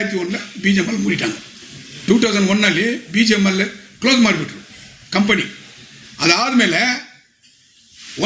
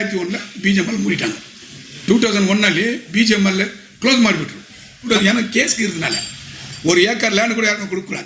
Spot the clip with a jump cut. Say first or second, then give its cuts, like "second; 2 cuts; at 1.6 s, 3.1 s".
second; 1 cut; at 5.0 s